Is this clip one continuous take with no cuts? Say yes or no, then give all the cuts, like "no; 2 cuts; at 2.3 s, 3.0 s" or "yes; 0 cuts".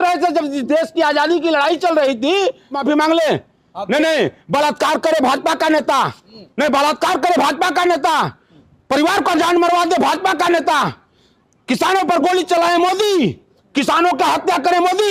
no; 1 cut; at 2.7 s